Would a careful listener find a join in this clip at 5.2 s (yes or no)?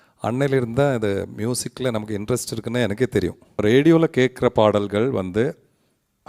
no